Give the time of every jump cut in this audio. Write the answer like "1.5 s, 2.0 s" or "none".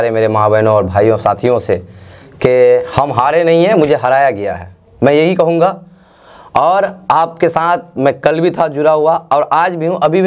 none